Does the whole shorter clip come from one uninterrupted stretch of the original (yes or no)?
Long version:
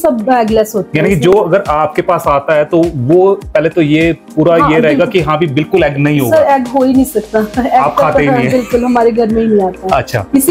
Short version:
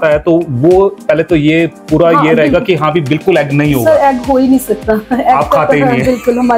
yes